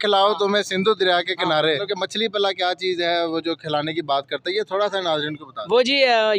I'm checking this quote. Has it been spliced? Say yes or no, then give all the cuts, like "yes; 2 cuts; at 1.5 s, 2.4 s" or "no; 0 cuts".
yes; 1 cut; at 1.8 s